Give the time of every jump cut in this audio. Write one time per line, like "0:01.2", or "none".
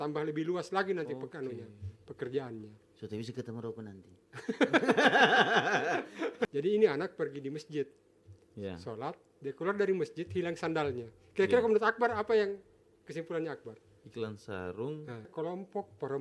0:06.5
0:15.3